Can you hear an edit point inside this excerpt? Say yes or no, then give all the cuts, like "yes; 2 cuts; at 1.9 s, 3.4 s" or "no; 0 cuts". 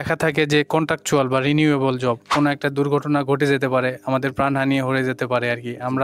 yes; 1 cut; at 2.2 s